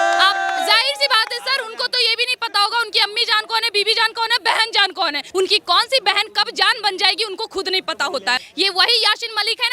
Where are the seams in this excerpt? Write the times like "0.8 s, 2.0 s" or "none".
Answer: 5.2 s, 8.5 s